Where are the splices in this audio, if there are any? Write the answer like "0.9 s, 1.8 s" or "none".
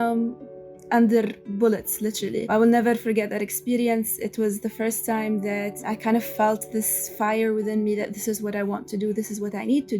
2.5 s, 5.8 s